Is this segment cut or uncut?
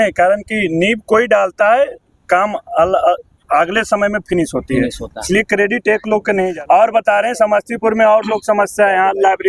cut